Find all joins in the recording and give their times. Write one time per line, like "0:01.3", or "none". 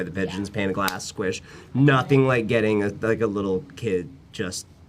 none

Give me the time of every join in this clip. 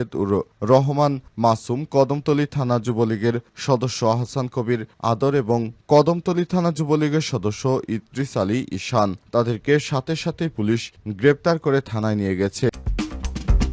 0:12.7

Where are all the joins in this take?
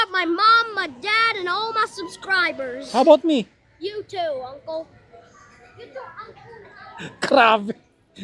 none

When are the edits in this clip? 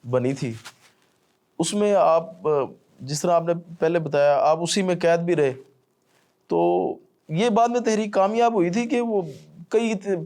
none

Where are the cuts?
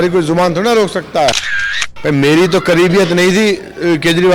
0:01.7

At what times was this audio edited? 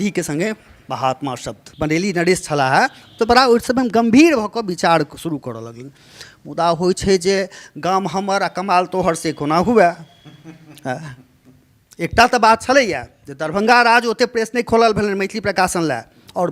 0:01.6

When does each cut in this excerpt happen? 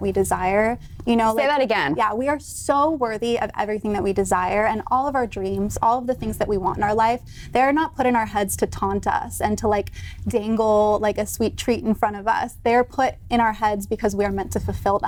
none

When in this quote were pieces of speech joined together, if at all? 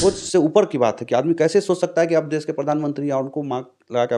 none

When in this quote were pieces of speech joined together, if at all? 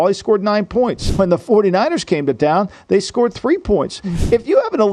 0:01.0

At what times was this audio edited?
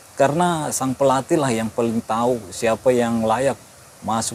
none

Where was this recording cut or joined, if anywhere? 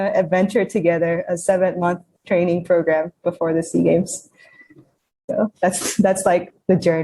none

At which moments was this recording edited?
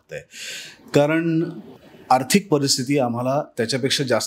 none

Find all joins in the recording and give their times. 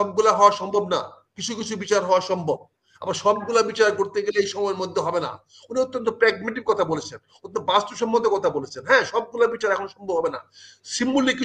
none

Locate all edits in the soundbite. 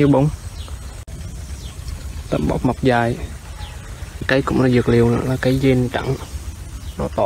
0:01.0
0:04.3

